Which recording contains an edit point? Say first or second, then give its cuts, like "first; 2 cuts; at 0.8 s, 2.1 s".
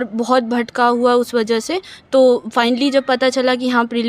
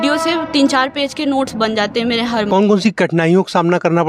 second; 1 cut; at 2.5 s